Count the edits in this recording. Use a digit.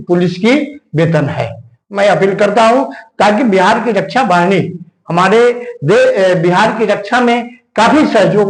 0